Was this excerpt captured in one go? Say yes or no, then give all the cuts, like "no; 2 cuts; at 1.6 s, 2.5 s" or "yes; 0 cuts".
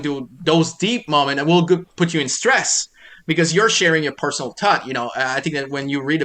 yes; 0 cuts